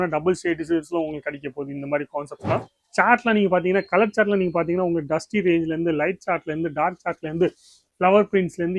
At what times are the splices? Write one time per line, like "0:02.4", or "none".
0:02.8